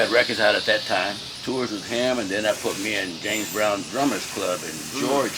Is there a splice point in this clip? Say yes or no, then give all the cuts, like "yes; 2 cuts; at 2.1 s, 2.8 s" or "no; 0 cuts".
yes; 1 cut; at 1.3 s